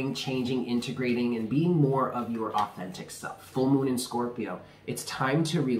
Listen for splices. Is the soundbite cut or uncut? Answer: cut